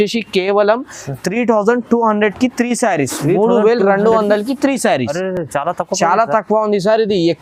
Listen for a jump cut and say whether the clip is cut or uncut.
uncut